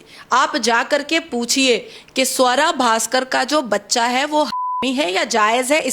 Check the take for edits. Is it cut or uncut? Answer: uncut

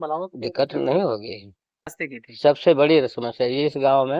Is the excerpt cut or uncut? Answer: cut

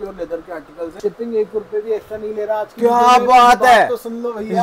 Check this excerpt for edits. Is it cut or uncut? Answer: cut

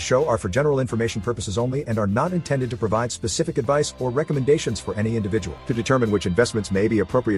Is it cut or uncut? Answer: uncut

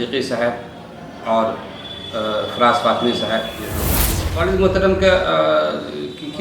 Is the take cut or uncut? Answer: cut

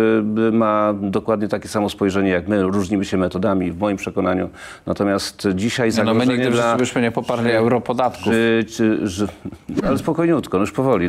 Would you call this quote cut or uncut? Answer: cut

